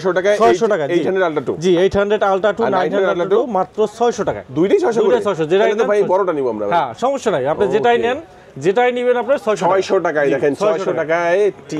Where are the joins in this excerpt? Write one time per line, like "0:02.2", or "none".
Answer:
none

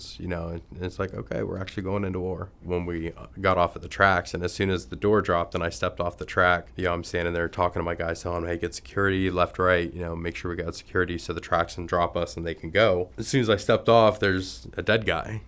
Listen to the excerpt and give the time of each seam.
0:02.6
0:06.7
0:13.2

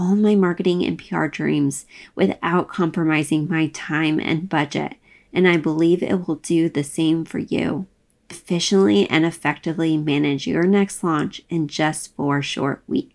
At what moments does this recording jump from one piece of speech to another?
0:08.4

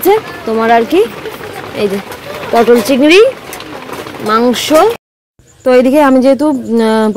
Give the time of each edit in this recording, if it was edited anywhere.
0:05.1

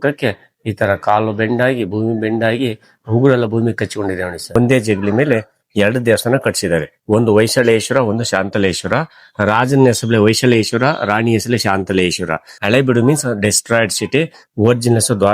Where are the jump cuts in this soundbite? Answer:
0:04.5
0:12.5

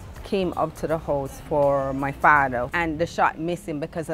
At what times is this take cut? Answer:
0:02.7

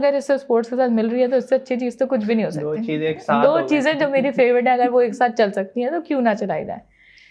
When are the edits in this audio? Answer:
none

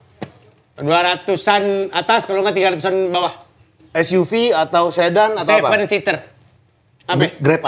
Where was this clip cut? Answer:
none

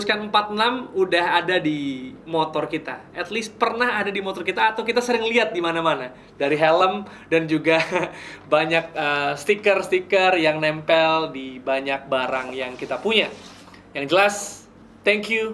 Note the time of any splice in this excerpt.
none

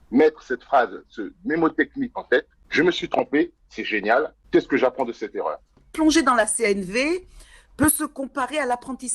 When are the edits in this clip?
0:02.6
0:04.4
0:05.9

